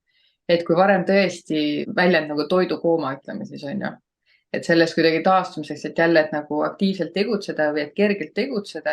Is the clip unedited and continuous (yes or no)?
no